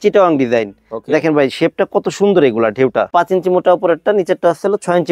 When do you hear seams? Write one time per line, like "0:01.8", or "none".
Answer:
0:03.1